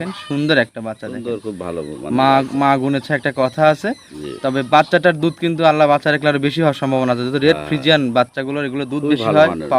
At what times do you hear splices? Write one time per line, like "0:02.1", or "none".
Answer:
none